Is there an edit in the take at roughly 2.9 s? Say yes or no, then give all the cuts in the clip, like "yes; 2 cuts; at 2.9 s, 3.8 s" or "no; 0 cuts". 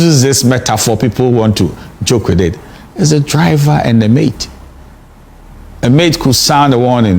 no; 0 cuts